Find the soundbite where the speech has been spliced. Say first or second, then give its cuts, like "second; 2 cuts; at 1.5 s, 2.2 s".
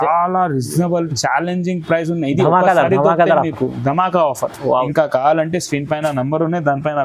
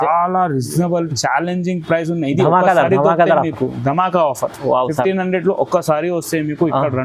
first; 1 cut; at 4.9 s